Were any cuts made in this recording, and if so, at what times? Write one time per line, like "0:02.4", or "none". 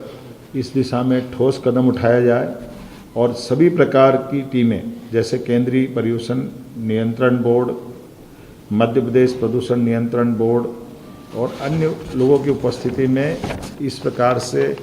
none